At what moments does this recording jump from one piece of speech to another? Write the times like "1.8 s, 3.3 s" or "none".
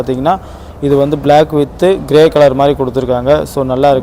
none

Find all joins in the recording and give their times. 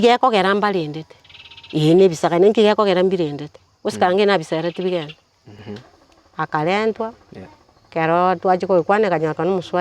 5.6 s

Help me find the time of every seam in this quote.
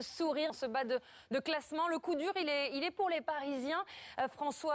2.5 s

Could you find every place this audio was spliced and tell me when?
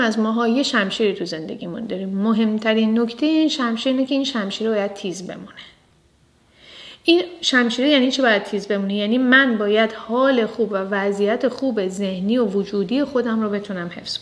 none

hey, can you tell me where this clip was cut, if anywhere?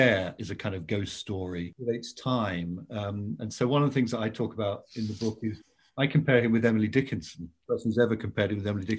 1.7 s, 7.5 s

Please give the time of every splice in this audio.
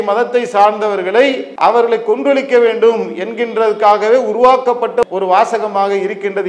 1.5 s, 5.0 s

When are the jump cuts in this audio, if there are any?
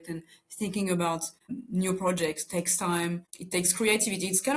1.5 s, 3.3 s

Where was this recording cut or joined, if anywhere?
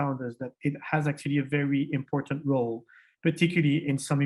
none

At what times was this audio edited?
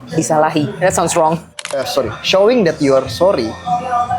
1.6 s

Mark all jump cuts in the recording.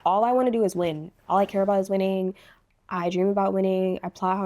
none

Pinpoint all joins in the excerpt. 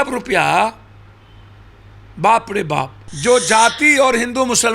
3.0 s

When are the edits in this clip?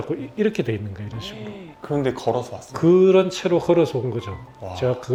none

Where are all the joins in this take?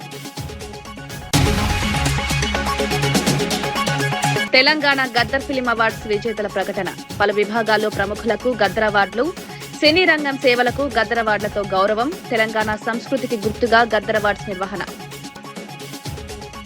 1.0 s

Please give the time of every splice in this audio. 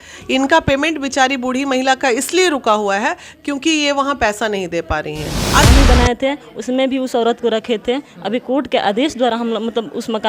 5.6 s

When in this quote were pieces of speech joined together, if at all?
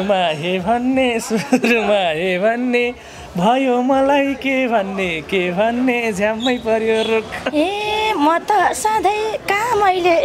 7.4 s

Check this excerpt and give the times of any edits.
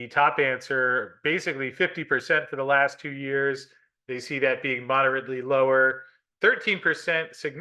none

